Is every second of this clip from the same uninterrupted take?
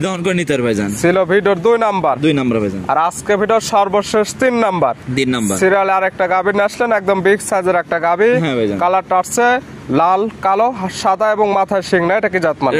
yes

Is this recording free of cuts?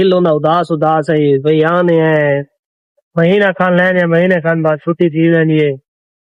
yes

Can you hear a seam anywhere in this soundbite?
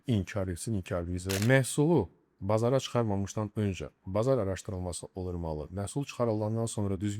yes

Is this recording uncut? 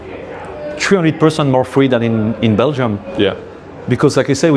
yes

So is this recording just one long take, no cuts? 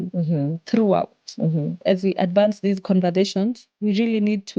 no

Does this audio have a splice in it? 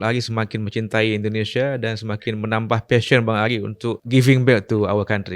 yes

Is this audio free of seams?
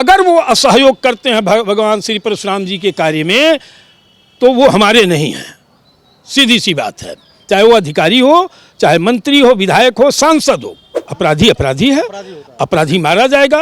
no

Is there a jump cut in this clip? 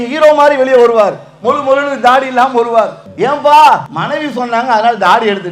yes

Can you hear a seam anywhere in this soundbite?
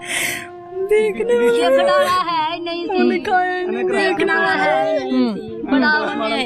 no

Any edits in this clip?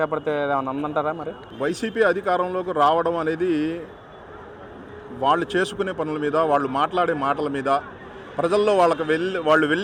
no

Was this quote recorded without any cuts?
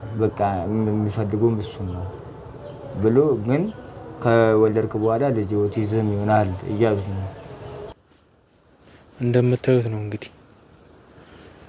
no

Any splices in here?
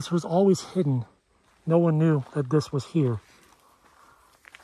no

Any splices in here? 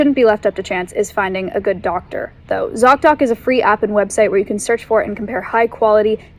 no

